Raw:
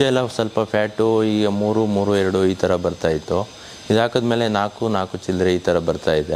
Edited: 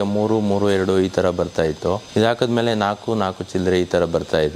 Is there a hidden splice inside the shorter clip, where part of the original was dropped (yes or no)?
yes